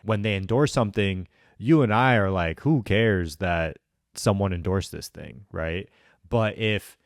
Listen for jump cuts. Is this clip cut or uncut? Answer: uncut